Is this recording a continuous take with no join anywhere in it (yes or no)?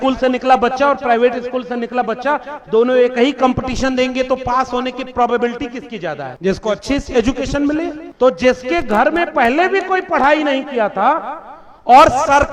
no